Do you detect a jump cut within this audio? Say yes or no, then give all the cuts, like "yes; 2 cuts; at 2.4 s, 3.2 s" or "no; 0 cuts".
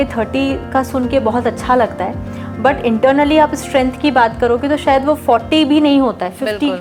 no; 0 cuts